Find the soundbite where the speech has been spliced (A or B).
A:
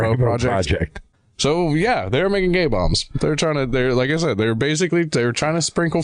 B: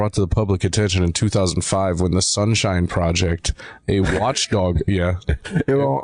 A